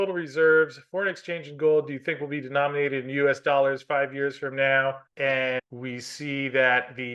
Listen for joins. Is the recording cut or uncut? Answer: cut